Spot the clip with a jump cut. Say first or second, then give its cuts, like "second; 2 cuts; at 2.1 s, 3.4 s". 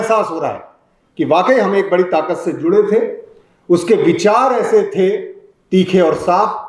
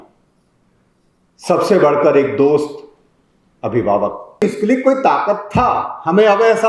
second; 1 cut; at 4.4 s